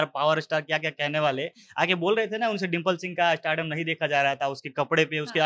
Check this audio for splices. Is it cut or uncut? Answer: uncut